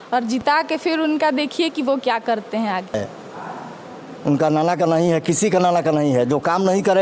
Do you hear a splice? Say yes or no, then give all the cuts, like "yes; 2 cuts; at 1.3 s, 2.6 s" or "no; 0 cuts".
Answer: yes; 1 cut; at 3.0 s